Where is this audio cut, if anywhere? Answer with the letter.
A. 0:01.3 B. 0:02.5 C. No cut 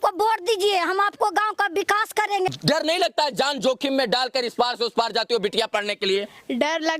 B